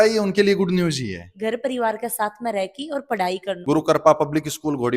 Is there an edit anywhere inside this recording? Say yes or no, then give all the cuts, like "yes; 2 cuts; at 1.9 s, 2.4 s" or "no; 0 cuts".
yes; 2 cuts; at 1.3 s, 3.6 s